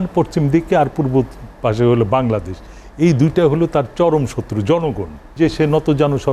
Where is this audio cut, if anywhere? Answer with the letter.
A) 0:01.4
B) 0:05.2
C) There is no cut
B